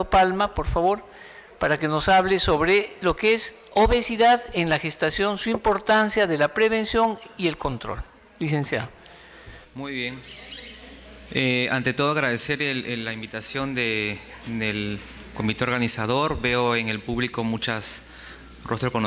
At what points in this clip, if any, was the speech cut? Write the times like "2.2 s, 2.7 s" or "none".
none